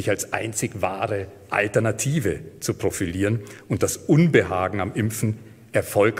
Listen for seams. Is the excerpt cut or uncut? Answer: uncut